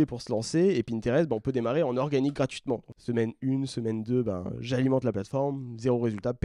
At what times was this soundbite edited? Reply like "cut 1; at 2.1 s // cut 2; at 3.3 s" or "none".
cut 1; at 2.9 s